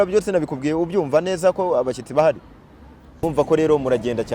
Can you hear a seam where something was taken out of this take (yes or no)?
yes